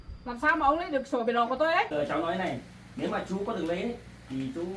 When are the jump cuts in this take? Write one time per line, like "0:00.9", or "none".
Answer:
0:01.9